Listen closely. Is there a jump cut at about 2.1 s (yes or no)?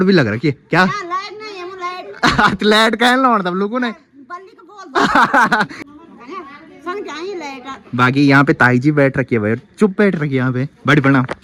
no